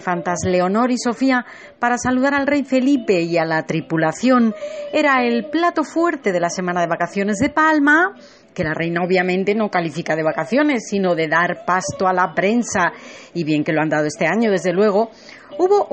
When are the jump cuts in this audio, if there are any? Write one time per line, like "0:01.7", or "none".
none

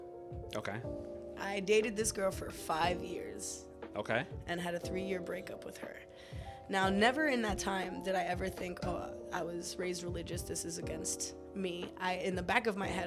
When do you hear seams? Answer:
none

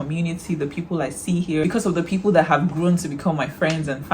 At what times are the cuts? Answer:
0:01.6

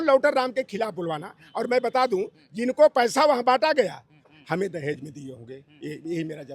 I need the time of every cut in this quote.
0:04.3

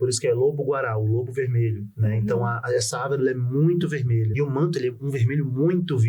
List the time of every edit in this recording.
0:04.3

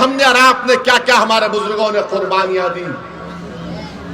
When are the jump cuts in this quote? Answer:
none

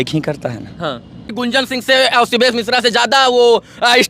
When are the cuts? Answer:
0:01.3

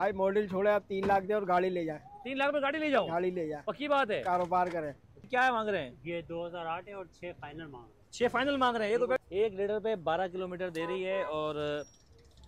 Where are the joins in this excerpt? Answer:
0:05.3
0:09.2

